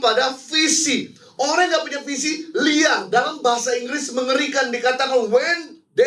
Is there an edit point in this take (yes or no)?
no